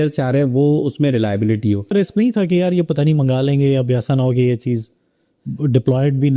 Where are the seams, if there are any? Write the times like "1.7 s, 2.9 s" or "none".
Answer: 1.9 s

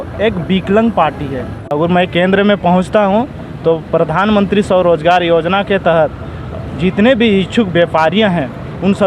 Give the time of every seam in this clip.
1.7 s

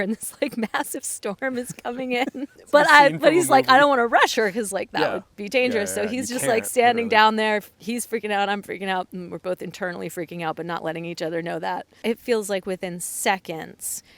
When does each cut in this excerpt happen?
2.6 s, 11.9 s

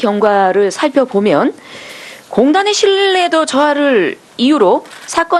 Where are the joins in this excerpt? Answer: none

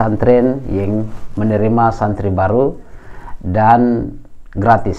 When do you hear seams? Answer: none

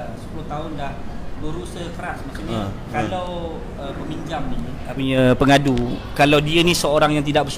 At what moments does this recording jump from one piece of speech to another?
5.0 s

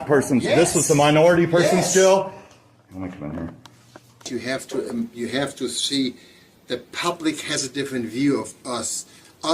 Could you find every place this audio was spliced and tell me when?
4.2 s

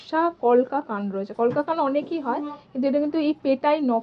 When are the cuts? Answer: none

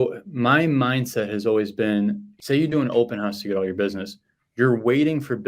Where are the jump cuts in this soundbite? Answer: 2.3 s

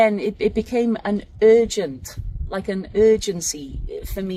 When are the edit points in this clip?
none

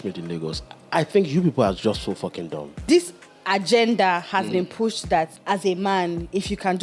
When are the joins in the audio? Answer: 2.8 s, 5.4 s

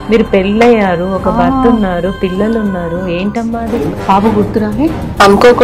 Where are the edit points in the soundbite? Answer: 3.8 s

